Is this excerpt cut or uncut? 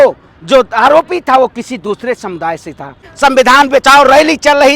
cut